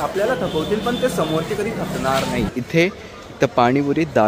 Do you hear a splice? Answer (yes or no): yes